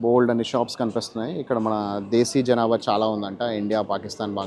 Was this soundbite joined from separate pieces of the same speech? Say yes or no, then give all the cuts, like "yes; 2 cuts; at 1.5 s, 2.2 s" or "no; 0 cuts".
no; 0 cuts